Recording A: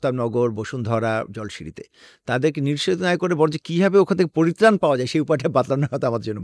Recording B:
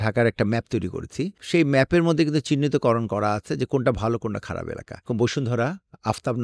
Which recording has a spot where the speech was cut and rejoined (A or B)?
B